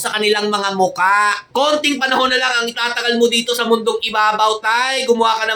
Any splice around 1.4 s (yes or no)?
yes